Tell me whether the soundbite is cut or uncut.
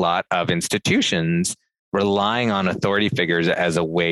uncut